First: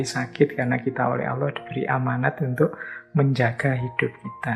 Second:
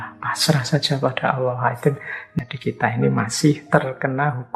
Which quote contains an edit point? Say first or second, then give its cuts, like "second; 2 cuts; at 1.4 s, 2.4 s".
second; 2 cuts; at 2.2 s, 3.6 s